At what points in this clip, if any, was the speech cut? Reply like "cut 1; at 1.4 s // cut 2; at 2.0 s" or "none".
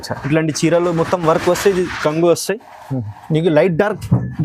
cut 1; at 3.1 s